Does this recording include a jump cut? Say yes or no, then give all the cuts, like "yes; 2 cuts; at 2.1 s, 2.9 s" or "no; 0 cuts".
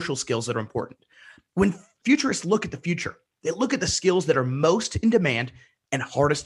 yes; 1 cut; at 2.0 s